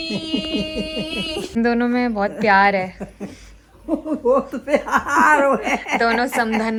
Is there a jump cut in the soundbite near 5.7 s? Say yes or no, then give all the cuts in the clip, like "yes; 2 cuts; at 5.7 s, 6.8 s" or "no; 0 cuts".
no; 0 cuts